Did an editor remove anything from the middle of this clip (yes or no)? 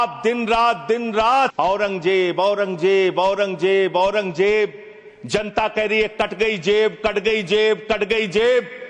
yes